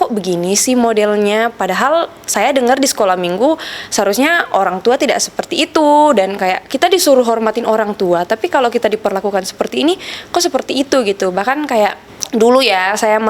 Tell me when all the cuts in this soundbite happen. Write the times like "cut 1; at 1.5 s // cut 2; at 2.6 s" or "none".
none